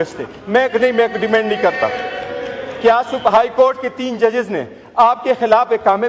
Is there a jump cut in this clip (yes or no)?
no